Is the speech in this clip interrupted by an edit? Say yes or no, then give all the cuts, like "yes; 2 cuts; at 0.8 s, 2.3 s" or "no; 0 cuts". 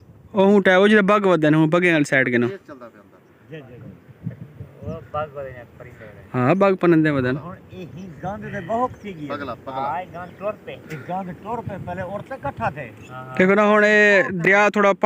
no; 0 cuts